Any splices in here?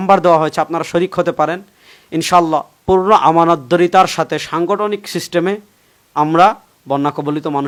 no; 0 cuts

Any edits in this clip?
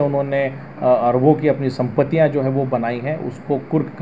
no; 0 cuts

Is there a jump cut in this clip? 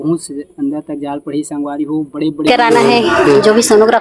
yes; 1 cut; at 2.5 s

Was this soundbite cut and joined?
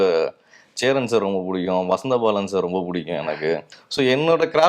yes; 1 cut; at 3.8 s

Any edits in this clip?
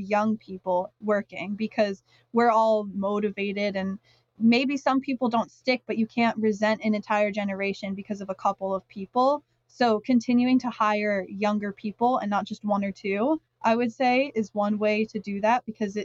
no; 0 cuts

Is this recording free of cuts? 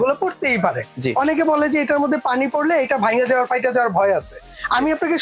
yes; 0 cuts

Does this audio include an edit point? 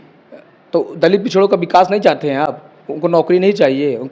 no; 0 cuts

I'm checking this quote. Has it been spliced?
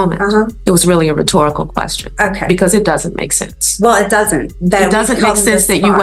no; 0 cuts

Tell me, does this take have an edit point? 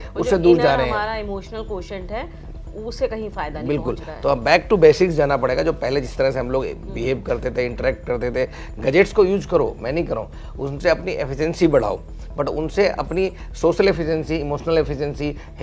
no; 0 cuts

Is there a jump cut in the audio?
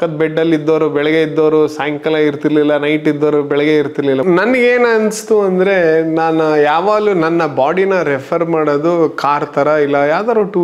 yes; 1 cut; at 4.2 s

